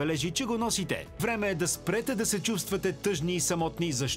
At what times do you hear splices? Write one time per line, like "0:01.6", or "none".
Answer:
0:01.1